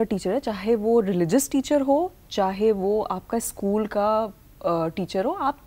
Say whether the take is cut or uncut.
uncut